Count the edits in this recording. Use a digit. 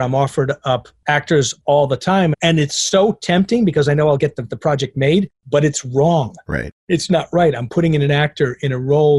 1